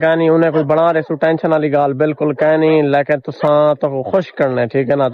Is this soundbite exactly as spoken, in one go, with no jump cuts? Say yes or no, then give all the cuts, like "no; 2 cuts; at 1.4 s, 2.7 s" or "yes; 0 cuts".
yes; 0 cuts